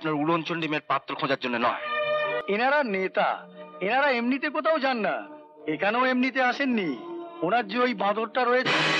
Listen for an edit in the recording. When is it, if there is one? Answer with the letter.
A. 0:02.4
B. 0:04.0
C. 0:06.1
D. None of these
A